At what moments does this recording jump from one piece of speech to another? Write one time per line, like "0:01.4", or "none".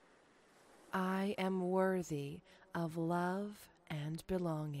0:00.9